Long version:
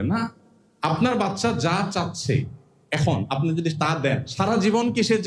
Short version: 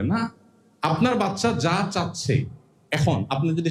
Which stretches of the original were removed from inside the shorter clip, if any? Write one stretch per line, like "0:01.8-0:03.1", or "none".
none